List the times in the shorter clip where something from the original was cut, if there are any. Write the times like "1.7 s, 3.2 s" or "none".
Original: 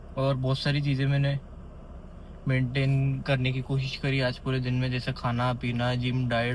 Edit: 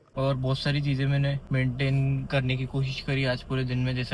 1.4 s